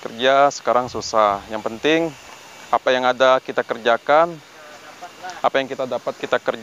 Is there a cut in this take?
no; 0 cuts

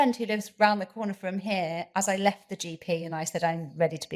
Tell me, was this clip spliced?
no; 0 cuts

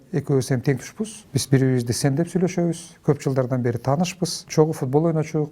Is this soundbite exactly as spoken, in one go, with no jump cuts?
no; 2 cuts; at 1.2 s, 4.4 s

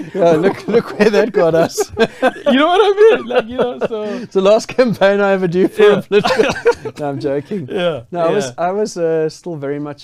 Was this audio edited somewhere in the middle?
no; 0 cuts

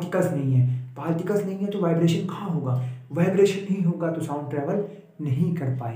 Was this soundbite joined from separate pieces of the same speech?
no; 0 cuts

